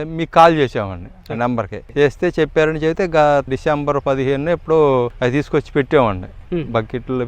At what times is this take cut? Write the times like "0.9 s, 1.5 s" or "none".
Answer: 1.8 s, 3.5 s, 5.1 s